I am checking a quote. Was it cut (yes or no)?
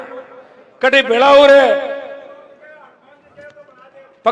no